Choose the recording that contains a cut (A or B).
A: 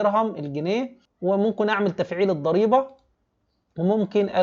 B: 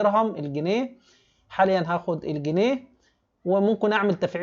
A